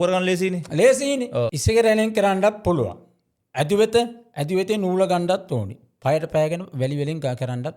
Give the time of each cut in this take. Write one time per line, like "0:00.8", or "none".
0:01.6